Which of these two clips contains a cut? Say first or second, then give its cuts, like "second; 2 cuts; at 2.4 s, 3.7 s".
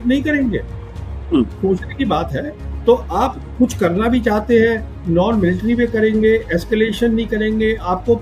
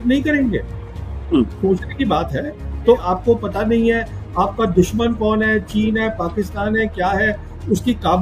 second; 1 cut; at 3.0 s